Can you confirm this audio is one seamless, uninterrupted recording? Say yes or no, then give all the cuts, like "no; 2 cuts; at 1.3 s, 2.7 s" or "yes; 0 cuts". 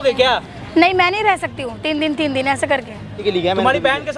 no; 1 cut; at 3.2 s